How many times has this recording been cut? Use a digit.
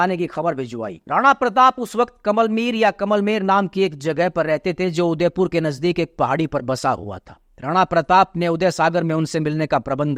0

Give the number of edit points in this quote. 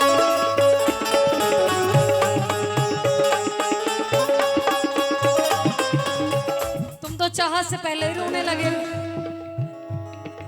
1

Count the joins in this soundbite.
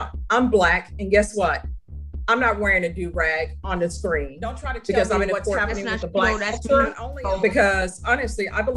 1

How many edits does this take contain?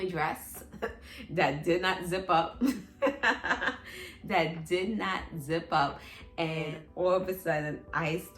1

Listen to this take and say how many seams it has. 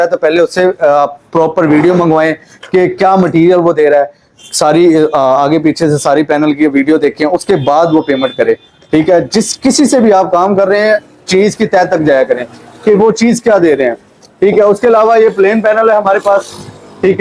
0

